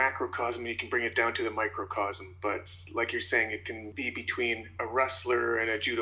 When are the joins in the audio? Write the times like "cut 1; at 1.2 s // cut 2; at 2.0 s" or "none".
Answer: cut 1; at 3.9 s